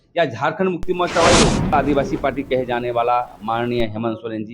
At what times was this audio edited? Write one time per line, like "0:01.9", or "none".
0:01.7